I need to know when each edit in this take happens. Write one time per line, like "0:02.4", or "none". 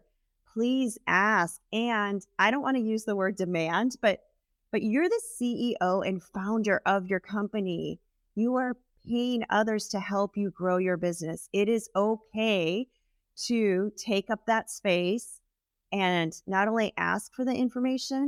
none

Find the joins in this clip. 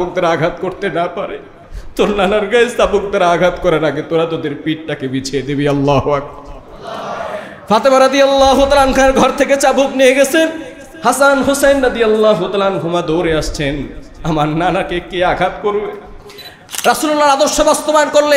0:16.7

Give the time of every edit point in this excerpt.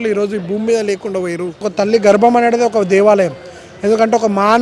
0:01.7

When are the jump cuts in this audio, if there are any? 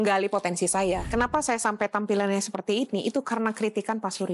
0:01.1

